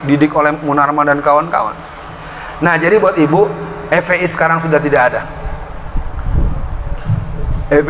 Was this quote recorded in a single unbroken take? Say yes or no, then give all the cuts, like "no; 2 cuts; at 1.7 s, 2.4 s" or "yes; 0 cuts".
yes; 0 cuts